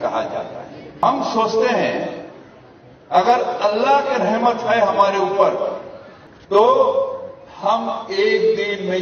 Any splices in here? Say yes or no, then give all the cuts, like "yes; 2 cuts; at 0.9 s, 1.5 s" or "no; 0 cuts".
yes; 1 cut; at 1.0 s